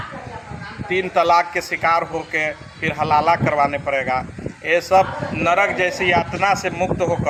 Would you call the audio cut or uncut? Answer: uncut